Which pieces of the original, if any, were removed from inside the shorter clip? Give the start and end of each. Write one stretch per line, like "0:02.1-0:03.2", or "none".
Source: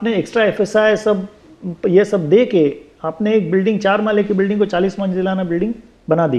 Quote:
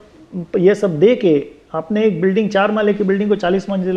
none